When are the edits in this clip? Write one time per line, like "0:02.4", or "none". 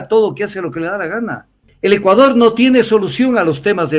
0:01.7